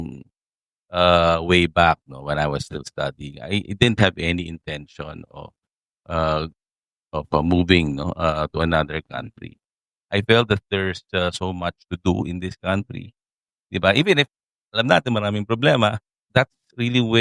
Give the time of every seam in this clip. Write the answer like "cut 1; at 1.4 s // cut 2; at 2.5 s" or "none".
cut 1; at 16.2 s